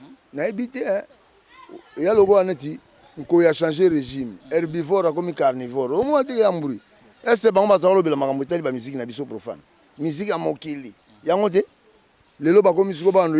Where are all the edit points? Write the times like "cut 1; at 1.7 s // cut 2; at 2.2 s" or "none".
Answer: none